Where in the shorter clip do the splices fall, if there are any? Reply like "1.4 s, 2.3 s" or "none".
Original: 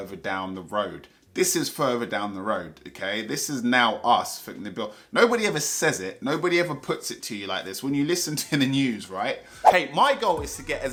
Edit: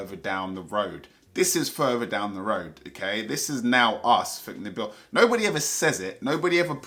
none